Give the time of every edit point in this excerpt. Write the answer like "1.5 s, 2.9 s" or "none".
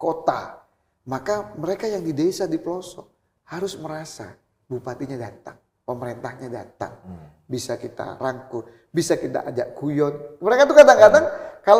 none